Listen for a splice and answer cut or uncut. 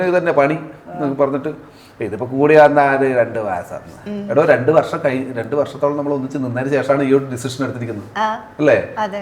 uncut